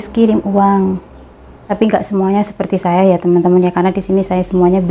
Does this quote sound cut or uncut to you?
cut